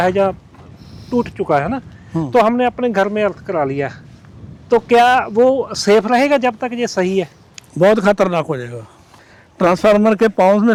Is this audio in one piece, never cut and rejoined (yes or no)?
yes